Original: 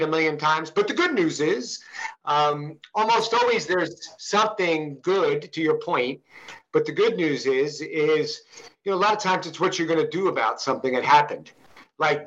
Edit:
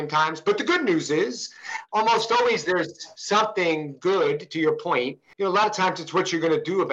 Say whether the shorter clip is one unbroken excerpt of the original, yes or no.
no